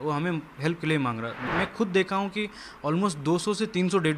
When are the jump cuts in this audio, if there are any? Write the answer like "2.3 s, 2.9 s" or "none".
1.5 s